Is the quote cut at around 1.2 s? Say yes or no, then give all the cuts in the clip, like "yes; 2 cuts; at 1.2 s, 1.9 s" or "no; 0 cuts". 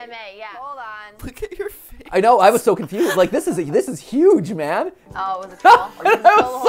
yes; 2 cuts; at 1.2 s, 5.0 s